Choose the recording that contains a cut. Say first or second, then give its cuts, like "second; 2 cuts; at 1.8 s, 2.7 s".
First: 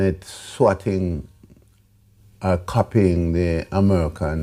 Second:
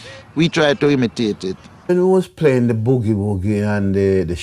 second; 1 cut; at 1.9 s